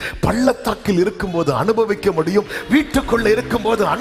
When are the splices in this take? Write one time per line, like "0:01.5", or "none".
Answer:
none